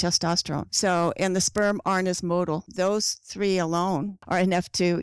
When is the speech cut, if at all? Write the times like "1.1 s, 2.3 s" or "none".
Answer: 2.7 s, 4.2 s